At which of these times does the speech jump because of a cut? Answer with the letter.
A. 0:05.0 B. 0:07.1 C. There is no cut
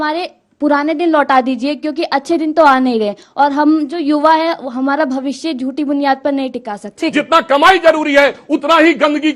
B